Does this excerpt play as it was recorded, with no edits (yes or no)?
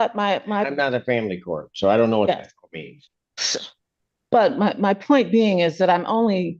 yes